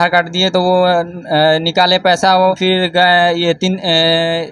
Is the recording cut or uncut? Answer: cut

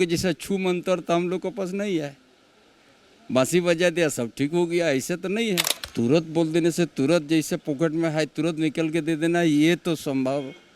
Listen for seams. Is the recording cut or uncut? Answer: cut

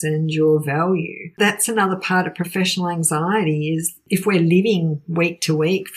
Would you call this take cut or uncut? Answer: cut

